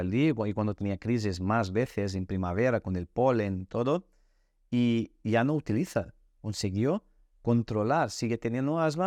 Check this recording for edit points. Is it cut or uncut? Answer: uncut